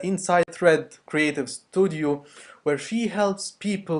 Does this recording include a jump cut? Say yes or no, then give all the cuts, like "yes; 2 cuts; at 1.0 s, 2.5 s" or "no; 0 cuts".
yes; 1 cut; at 1.9 s